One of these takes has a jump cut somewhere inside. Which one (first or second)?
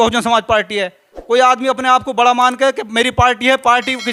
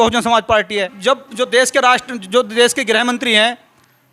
second